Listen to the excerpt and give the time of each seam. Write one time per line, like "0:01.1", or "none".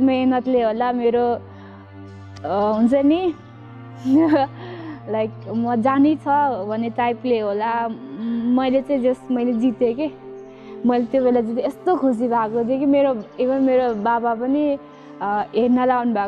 none